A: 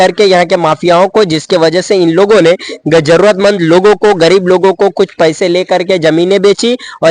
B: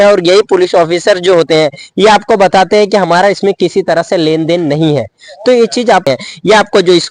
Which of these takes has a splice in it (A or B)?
B